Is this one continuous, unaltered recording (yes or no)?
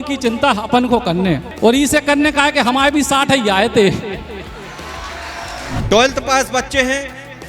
no